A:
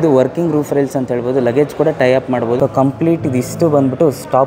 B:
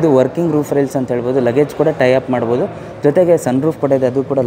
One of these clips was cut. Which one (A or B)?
A